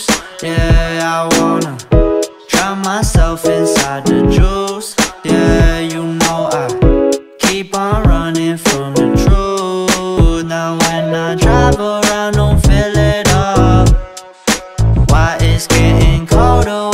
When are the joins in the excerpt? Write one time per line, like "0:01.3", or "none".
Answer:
0:10.2

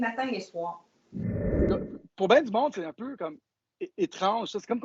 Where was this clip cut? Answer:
0:01.4

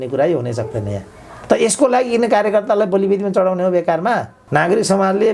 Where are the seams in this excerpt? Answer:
0:04.3

